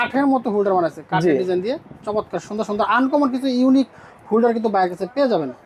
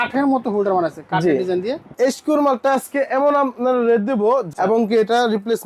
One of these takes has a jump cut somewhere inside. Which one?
second; 2 cuts; at 1.9 s, 4.5 s

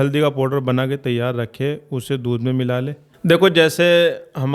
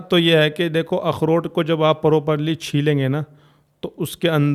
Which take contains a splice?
first; 1 cut; at 3.0 s

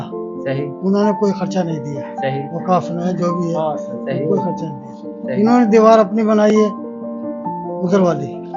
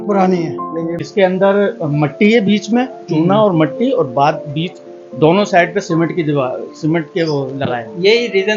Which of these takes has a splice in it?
second; 1 cut; at 1.0 s

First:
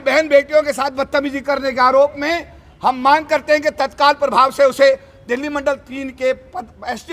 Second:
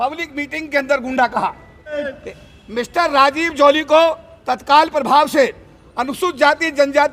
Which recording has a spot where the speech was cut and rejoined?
second; 1 cut; at 2.1 s

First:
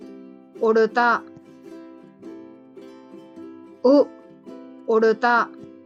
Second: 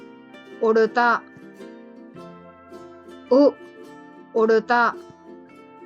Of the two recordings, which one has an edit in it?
second; 3 cuts; at 1.2 s, 2.9 s, 4.9 s

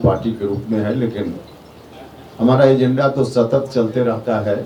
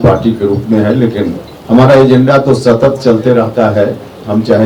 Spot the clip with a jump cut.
second; 1 cut; at 1.5 s

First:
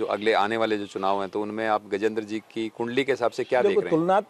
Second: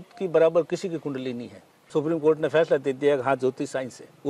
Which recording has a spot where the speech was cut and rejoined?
second; 1 cut; at 1.8 s

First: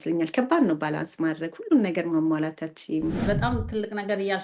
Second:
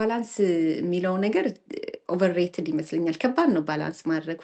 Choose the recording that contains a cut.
first; 1 cut; at 3.2 s

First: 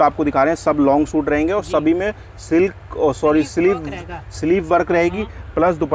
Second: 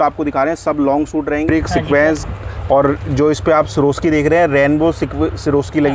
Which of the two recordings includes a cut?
second; 1 cut; at 1.5 s

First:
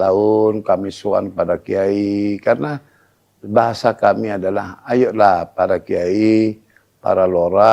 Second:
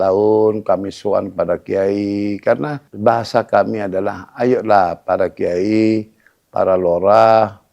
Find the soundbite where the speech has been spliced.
second; 1 cut; at 2.8 s

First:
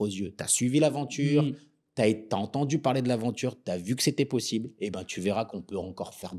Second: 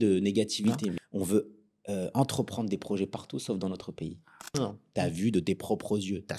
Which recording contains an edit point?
second; 2 cuts; at 1.0 s, 4.5 s

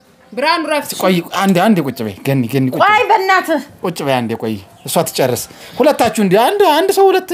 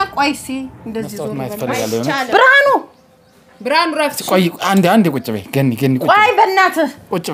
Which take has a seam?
second; 1 cut; at 1.9 s

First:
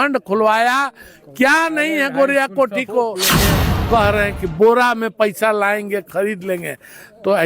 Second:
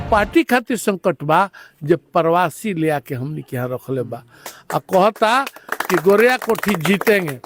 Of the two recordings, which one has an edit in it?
first; 1 cut; at 3.4 s

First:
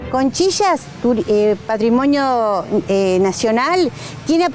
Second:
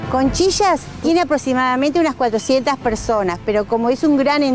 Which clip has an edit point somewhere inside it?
second; 1 cut; at 0.9 s

